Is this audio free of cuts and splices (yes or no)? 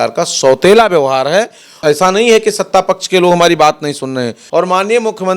no